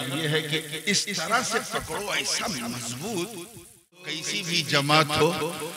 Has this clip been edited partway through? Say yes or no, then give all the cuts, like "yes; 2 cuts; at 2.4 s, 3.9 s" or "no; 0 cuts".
yes; 1 cut; at 4.3 s